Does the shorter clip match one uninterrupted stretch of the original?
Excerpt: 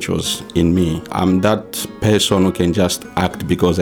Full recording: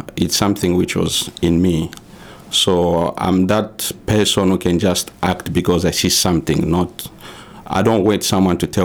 no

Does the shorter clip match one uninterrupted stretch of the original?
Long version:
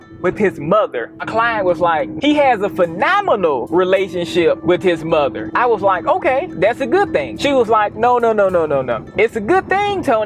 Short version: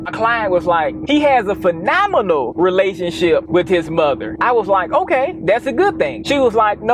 yes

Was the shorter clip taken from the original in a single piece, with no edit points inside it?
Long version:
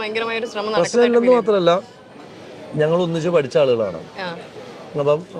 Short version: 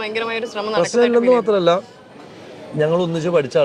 yes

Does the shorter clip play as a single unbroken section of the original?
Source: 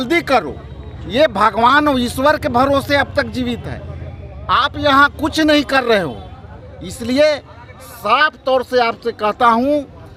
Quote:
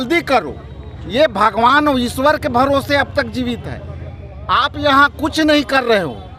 yes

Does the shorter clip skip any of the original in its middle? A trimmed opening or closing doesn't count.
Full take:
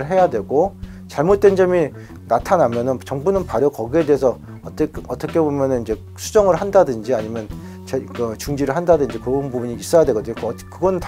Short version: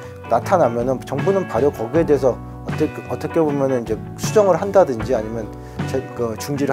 no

